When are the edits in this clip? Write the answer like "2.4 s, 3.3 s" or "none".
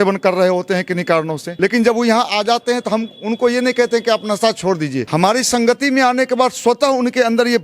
1.4 s, 5.0 s